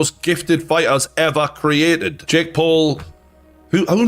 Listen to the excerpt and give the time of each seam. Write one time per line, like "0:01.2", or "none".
0:02.0